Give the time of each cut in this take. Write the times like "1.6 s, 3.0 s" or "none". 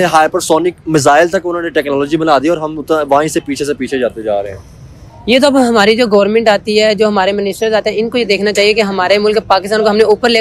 none